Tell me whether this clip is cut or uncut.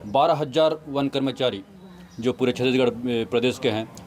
uncut